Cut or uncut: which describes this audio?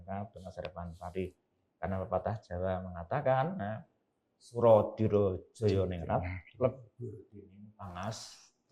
uncut